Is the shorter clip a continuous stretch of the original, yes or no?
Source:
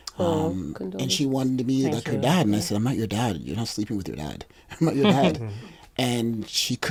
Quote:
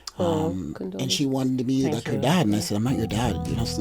yes